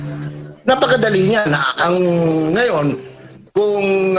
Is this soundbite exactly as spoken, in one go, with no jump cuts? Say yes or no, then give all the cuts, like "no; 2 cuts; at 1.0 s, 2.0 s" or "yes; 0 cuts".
yes; 0 cuts